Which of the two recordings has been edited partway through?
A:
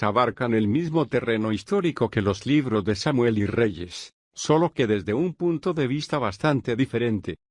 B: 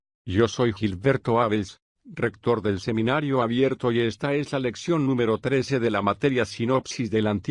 A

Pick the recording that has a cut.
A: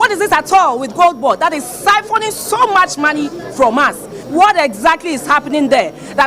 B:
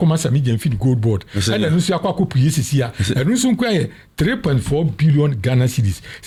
A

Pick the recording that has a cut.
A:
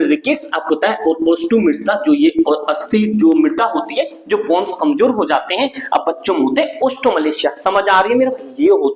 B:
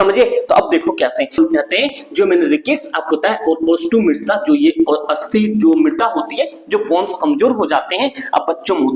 B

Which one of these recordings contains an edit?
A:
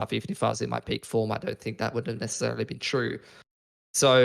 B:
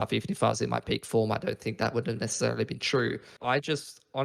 B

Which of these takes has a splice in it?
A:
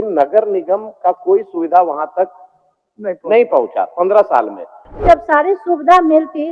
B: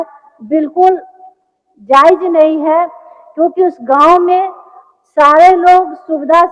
A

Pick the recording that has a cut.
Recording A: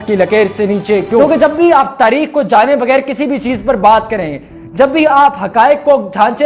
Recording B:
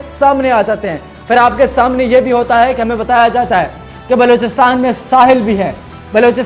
A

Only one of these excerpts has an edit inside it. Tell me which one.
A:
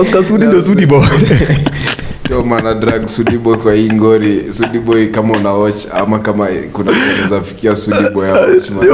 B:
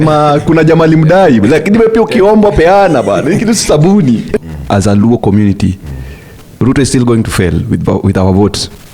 B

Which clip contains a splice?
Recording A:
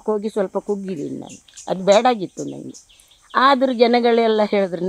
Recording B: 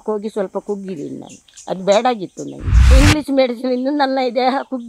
B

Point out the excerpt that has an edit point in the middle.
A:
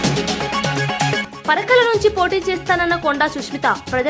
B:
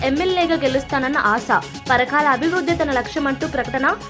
A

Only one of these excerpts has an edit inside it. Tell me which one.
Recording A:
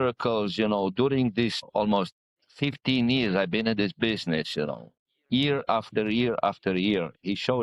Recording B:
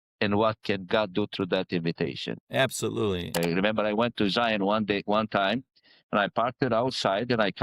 B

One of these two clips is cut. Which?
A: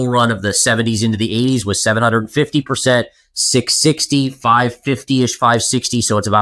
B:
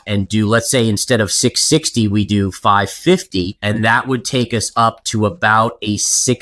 B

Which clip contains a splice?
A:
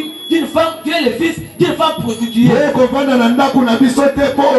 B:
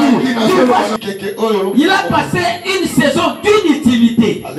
B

